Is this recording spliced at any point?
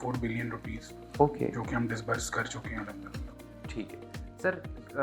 no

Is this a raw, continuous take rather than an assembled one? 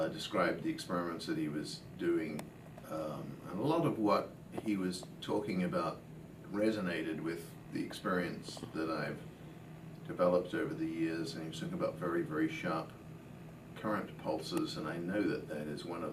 yes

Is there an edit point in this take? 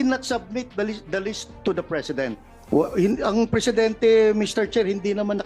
yes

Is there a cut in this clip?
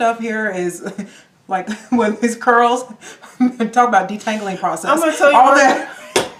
no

